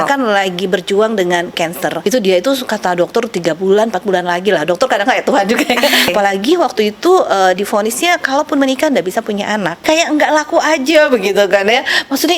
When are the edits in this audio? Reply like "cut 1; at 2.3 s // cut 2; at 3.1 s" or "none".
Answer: cut 1; at 2.0 s // cut 2; at 6.1 s // cut 3; at 9.8 s